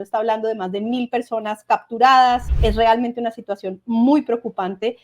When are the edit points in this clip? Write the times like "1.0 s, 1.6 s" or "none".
2.5 s

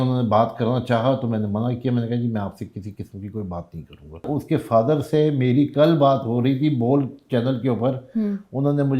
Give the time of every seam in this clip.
4.3 s

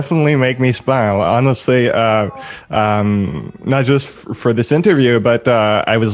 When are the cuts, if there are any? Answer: none

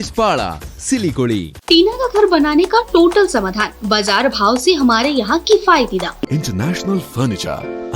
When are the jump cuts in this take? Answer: 1.5 s, 6.3 s

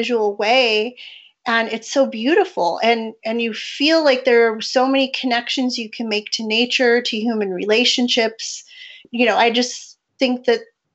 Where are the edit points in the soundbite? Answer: 9.0 s

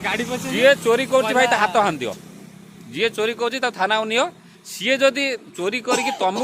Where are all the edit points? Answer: none

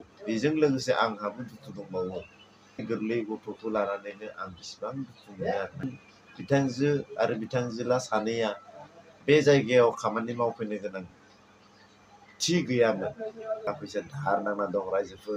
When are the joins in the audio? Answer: 2.8 s, 5.9 s, 13.7 s

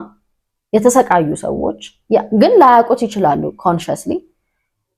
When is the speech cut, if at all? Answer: none

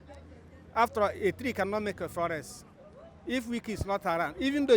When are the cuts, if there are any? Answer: none

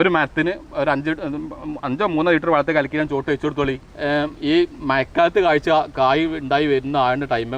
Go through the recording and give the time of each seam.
3.9 s

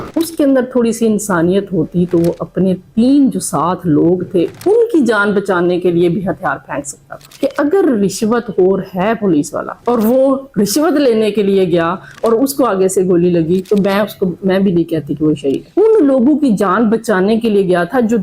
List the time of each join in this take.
7.4 s, 15.6 s

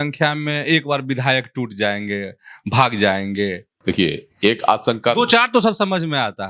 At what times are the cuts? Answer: none

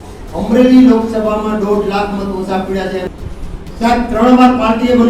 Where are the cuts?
3.1 s

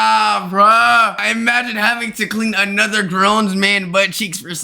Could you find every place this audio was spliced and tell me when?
1.2 s

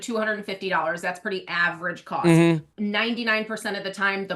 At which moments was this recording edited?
2.7 s

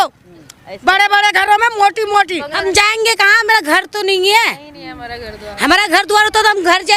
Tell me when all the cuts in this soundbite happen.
2.5 s

